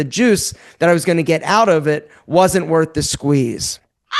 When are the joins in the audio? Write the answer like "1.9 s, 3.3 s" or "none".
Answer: none